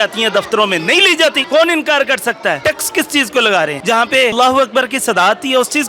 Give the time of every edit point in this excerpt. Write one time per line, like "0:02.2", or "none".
0:01.4
0:02.6
0:04.3